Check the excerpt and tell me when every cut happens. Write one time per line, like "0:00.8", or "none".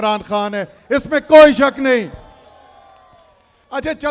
none